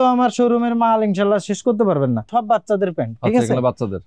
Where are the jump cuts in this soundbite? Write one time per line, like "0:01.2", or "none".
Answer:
0:02.3